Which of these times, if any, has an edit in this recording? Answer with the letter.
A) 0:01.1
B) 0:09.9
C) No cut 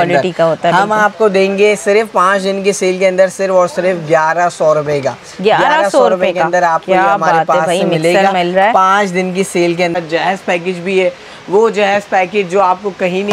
B